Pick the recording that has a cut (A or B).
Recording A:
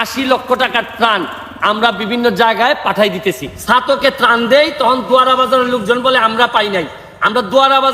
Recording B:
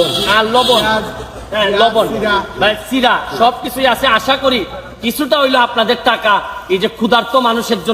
A